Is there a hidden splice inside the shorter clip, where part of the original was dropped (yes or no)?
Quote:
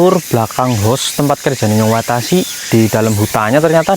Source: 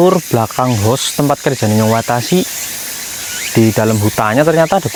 yes